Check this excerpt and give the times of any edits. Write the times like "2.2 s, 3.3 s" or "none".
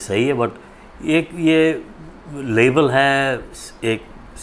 none